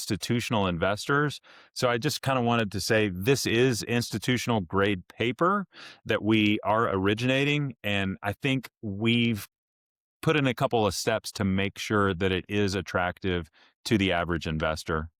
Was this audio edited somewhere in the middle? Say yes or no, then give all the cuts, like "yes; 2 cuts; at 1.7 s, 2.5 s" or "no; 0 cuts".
no; 0 cuts